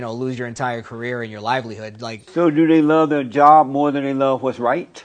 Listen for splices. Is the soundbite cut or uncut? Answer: uncut